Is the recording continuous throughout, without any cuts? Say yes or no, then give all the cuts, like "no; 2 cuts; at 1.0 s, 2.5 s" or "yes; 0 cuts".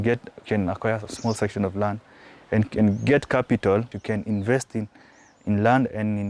no; 1 cut; at 3.9 s